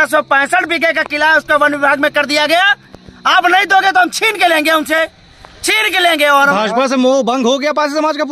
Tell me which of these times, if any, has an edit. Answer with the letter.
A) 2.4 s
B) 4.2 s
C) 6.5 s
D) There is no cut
C